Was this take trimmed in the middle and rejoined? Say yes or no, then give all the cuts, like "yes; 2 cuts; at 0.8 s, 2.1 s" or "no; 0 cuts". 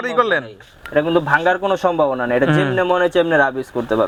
no; 0 cuts